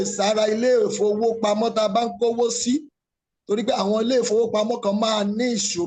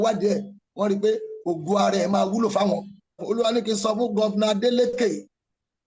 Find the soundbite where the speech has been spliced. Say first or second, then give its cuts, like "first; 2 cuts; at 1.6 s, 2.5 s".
second; 1 cut; at 3.2 s